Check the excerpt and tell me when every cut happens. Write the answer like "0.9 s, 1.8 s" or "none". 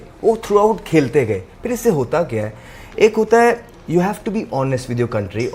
none